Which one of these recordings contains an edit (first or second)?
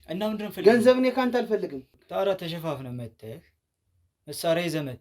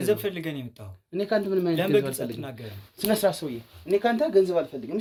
first